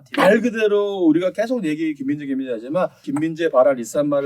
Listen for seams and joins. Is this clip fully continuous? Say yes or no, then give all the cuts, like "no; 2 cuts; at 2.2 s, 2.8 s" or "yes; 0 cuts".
no; 1 cut; at 3.0 s